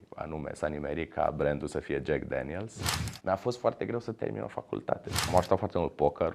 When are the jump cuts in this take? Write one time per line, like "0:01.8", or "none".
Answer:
0:03.1
0:05.3